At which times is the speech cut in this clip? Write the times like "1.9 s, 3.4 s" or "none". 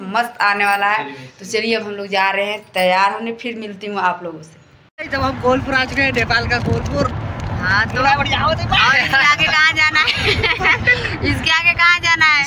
none